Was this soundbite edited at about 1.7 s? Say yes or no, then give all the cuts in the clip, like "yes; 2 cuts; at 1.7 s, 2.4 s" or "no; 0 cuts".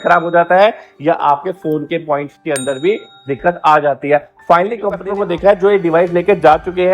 no; 1 cut; at 5.0 s